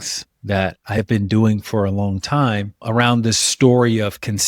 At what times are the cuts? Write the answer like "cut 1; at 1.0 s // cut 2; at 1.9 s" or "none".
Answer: cut 1; at 1.0 s // cut 2; at 3.4 s